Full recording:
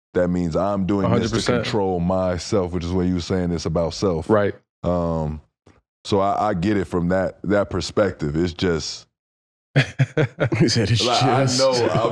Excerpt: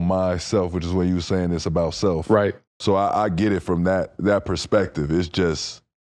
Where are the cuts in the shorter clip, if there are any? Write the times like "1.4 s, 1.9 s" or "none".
2.7 s